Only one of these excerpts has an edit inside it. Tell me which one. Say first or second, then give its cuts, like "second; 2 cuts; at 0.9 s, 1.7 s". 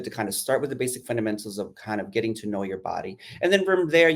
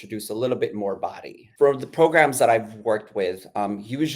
second; 1 cut; at 1.4 s